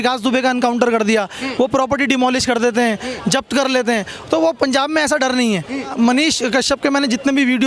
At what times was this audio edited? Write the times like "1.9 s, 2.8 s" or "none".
5.9 s